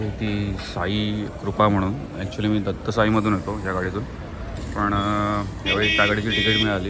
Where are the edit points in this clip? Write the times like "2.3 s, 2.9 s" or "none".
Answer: none